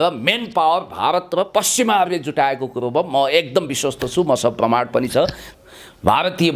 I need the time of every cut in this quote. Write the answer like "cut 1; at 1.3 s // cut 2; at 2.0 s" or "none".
cut 1; at 5.4 s

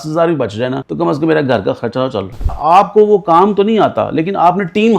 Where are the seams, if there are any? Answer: cut 1; at 0.8 s // cut 2; at 2.5 s

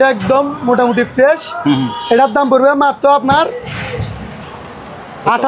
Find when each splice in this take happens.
none

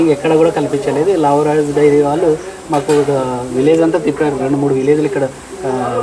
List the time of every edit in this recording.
none

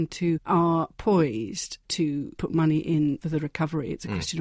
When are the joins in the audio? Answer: none

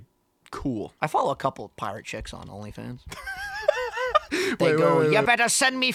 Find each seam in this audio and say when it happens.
cut 1; at 0.9 s

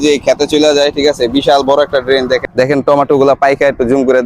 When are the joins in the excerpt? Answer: cut 1; at 2.4 s

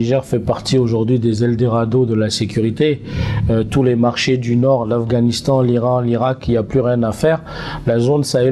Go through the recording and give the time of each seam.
none

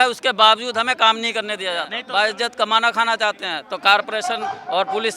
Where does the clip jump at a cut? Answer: cut 1; at 2.0 s

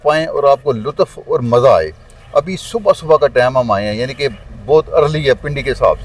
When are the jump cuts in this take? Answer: none

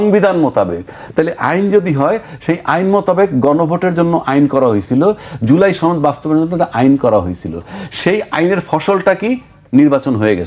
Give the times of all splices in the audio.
none

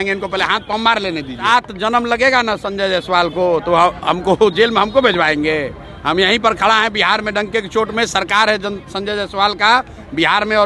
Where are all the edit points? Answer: cut 1; at 1.4 s

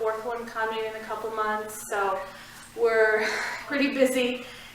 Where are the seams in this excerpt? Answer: cut 1; at 3.7 s

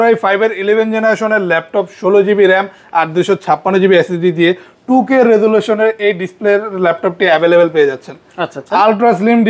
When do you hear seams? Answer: none

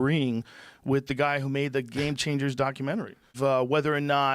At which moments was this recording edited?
cut 1; at 3.3 s

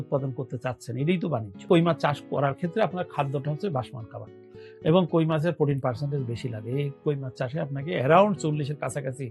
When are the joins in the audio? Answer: cut 1; at 1.7 s

